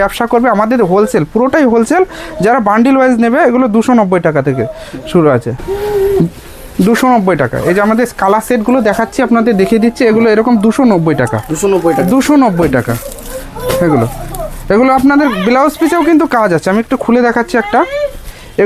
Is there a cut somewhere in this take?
no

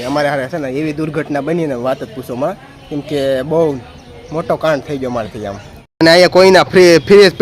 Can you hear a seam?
yes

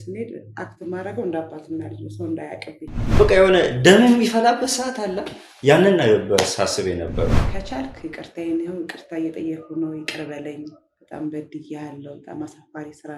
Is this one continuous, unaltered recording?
no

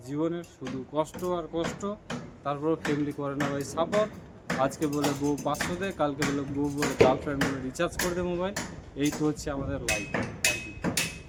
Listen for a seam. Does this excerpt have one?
no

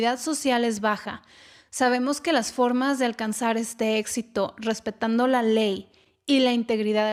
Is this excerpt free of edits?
yes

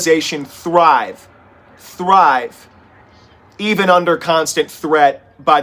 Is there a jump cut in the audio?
no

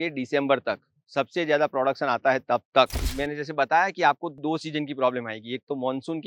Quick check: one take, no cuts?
no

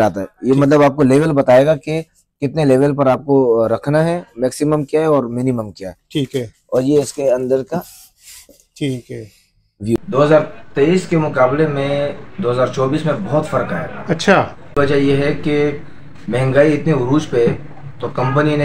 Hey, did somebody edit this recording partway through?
yes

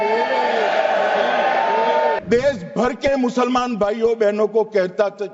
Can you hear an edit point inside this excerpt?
yes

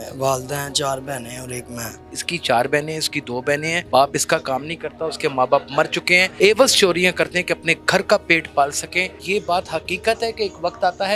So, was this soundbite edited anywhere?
yes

